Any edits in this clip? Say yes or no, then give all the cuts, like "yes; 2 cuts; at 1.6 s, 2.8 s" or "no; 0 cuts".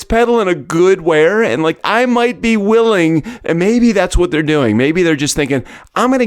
yes; 1 cut; at 1.7 s